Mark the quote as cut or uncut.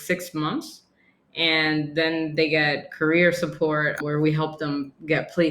cut